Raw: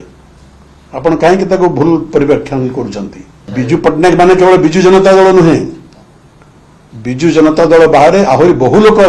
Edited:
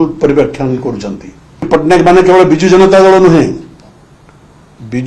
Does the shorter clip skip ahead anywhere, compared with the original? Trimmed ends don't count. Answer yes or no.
yes